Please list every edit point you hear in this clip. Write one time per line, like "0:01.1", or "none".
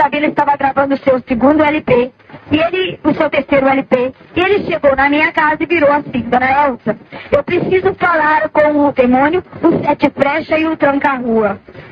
none